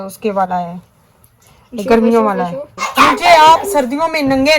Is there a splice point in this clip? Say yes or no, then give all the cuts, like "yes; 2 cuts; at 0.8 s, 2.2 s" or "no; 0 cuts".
yes; 1 cut; at 2.8 s